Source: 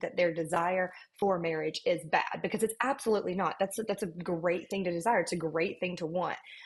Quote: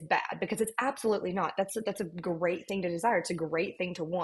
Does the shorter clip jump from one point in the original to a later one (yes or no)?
no